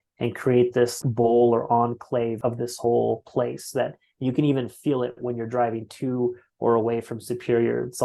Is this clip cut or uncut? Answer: cut